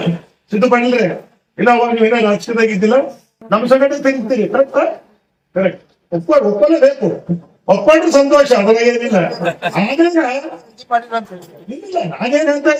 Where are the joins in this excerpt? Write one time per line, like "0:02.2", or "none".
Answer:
none